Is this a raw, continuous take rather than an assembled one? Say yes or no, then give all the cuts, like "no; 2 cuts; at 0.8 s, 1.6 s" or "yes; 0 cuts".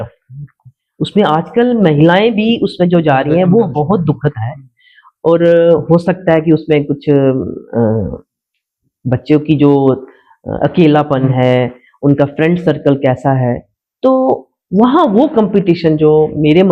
yes; 0 cuts